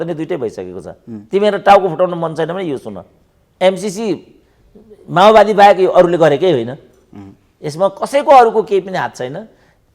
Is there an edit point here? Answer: no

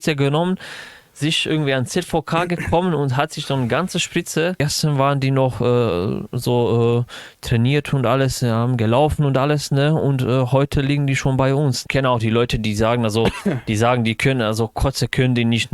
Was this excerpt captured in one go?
no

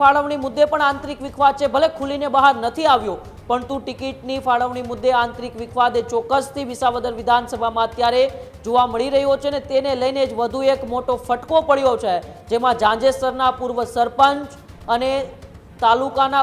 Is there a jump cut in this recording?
no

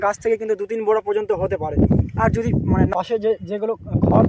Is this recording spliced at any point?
yes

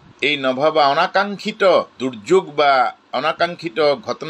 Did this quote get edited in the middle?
no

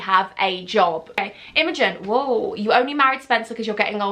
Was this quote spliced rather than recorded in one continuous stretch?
yes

